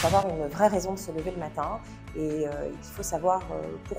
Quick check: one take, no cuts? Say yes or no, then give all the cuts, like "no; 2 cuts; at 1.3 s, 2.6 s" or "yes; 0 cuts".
yes; 0 cuts